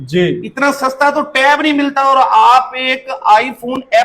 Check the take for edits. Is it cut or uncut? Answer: uncut